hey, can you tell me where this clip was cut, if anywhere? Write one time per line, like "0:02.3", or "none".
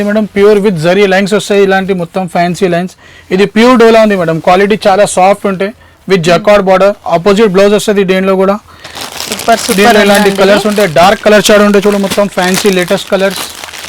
none